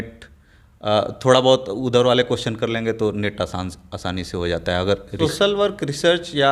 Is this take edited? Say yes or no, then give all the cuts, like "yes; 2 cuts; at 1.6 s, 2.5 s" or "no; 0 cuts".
yes; 1 cut; at 5.1 s